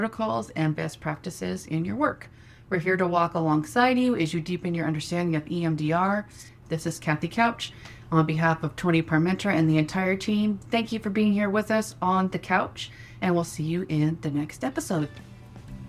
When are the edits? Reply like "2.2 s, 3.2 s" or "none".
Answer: 6.5 s